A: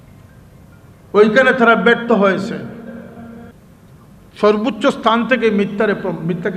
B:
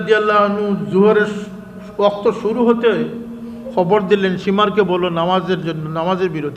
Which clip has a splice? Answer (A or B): A